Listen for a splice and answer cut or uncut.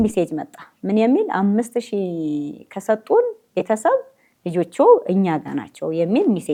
uncut